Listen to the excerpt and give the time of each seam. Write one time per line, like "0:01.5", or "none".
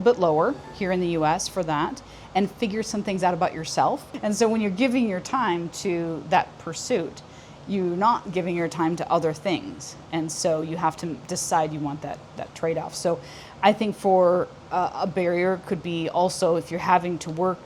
0:04.1